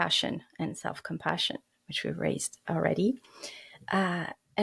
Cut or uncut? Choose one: uncut